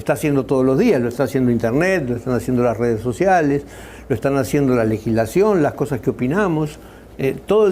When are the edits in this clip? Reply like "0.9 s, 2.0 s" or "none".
2.4 s